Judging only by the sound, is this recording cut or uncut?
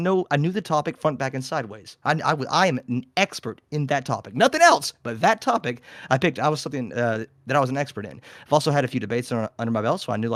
uncut